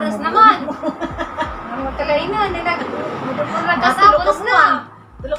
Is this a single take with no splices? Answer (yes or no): yes